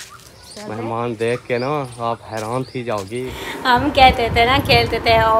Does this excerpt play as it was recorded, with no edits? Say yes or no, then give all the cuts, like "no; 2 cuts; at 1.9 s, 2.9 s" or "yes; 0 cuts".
no; 1 cut; at 3.4 s